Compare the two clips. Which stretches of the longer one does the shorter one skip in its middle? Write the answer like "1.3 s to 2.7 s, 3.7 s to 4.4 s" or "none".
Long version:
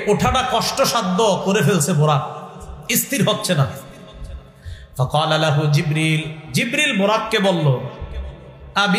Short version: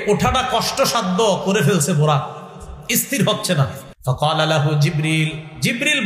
3.9 s to 4.8 s